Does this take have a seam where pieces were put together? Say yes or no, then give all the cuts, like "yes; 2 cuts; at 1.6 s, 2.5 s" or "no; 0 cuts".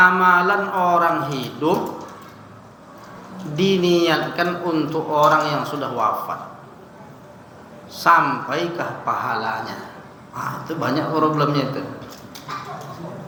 no; 0 cuts